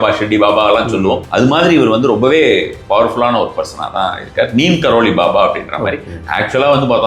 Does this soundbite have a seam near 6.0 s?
no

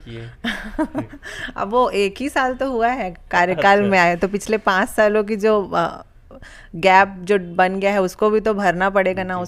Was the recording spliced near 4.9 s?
no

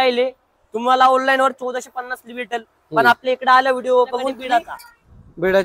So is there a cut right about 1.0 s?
no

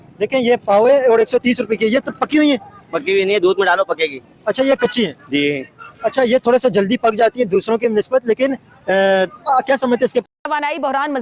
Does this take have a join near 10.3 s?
yes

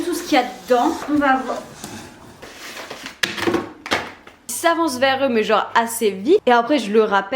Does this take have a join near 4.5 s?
yes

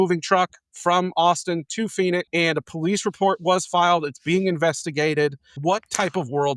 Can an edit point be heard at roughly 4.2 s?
no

